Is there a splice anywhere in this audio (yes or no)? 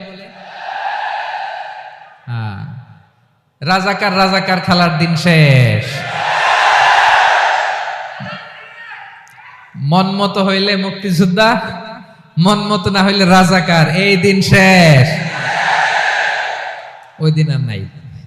yes